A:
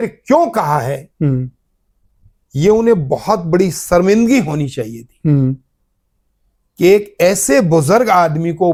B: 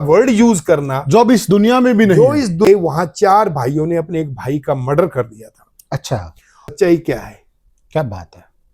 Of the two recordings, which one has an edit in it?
B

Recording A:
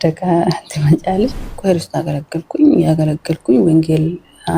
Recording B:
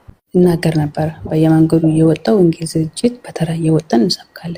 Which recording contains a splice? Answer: A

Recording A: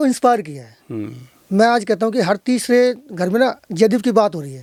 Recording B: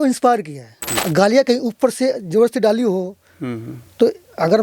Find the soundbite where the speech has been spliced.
B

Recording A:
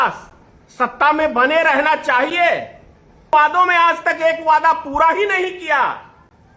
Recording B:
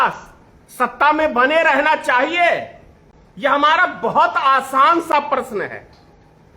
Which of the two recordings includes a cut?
A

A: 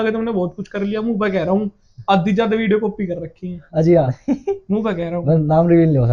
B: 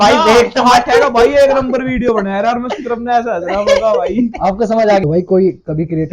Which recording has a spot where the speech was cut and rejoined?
B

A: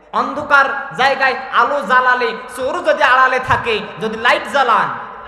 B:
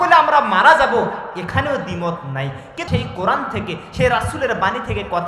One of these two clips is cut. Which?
B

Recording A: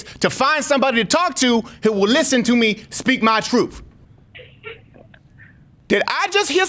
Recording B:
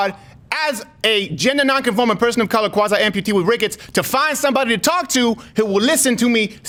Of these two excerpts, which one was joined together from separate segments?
A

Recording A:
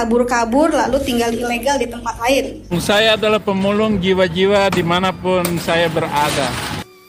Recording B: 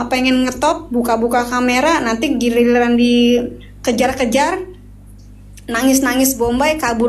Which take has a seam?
A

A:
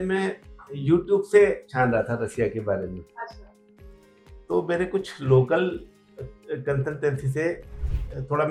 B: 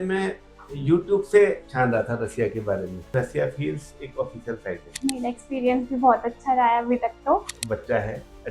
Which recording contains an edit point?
B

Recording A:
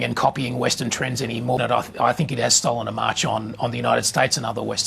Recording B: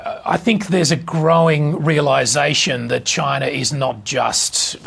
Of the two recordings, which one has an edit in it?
A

